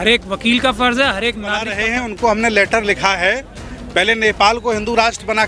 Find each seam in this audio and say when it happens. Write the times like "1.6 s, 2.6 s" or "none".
1.7 s